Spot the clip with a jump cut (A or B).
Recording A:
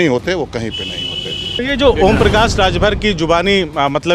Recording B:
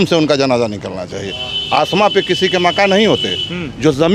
A